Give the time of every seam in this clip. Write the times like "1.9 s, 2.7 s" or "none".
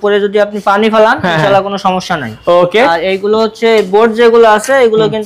none